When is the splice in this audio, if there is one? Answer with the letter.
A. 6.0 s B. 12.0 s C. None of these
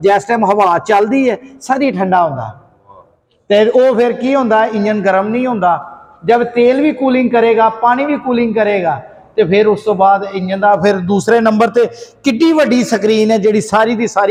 C